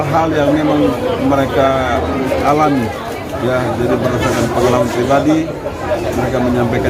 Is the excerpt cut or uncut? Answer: uncut